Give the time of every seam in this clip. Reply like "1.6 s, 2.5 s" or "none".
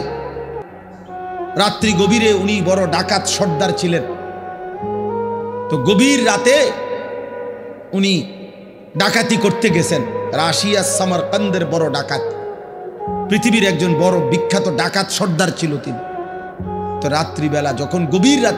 4.1 s, 5.7 s

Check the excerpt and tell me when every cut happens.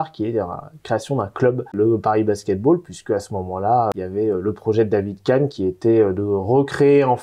1.8 s, 3.9 s

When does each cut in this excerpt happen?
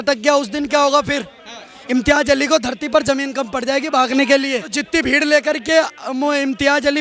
4.7 s

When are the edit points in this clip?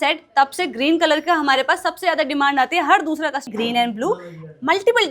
3.5 s

